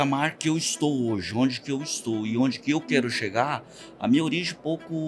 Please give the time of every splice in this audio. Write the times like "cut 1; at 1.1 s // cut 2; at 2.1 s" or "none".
none